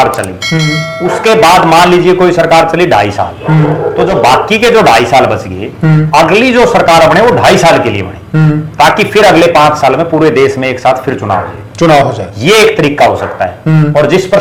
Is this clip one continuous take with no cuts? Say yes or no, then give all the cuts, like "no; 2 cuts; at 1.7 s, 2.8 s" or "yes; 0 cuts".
yes; 0 cuts